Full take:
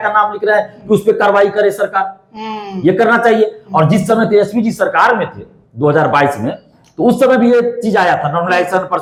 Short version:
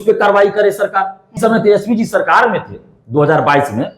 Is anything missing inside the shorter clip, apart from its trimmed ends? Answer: yes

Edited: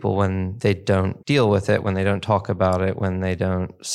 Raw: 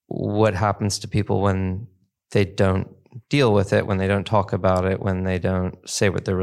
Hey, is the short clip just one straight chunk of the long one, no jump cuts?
no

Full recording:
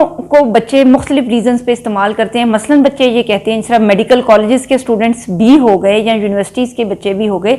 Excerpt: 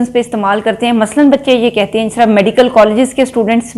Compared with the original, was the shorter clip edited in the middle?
no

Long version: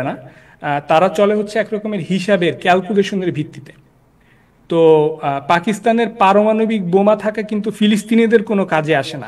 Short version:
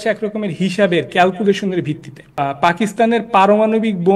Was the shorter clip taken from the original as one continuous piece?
no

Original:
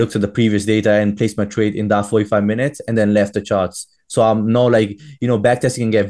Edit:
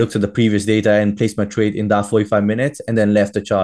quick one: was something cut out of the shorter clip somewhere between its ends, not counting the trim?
no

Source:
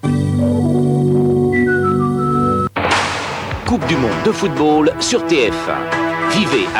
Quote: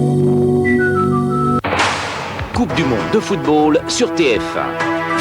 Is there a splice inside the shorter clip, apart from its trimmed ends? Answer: yes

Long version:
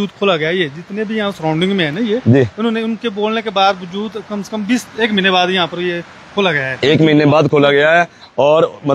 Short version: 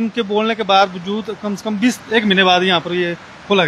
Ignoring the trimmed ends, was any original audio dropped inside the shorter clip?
no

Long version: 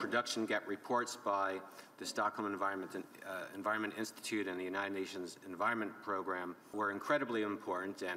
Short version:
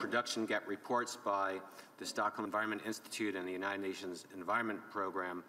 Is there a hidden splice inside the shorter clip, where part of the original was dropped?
yes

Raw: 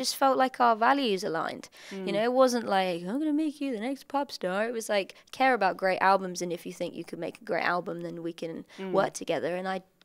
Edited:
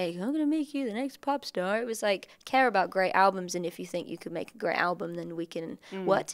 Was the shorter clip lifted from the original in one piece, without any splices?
yes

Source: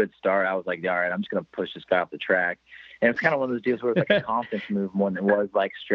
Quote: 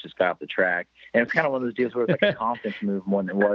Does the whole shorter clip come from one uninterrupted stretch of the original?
no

